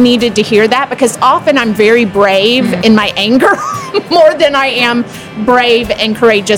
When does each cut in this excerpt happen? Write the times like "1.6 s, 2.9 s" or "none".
2.8 s